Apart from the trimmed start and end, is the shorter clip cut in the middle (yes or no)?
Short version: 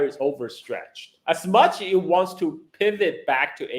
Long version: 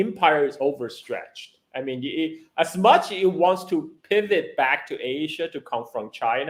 yes